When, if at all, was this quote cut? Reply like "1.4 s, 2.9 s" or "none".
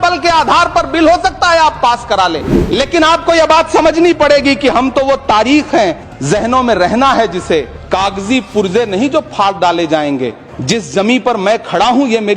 2.5 s, 6.1 s, 7.8 s, 10.5 s